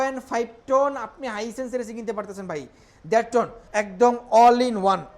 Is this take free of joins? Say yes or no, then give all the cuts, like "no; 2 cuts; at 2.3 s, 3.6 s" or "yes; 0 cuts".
no; 1 cut; at 3.6 s